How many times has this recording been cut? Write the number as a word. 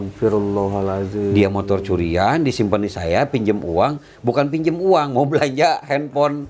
zero